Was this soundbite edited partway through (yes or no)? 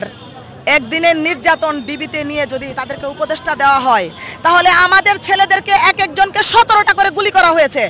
no